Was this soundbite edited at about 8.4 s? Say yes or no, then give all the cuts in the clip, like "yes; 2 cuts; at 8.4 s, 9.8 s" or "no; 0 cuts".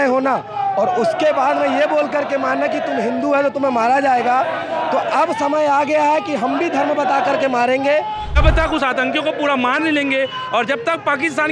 yes; 1 cut; at 8.4 s